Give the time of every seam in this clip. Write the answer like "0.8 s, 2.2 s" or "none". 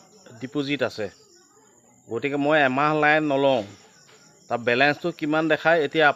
none